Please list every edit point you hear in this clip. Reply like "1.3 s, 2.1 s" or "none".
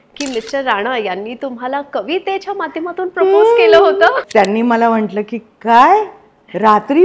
4.2 s